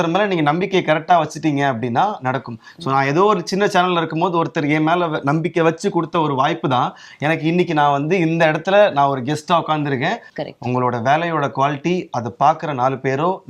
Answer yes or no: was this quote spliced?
yes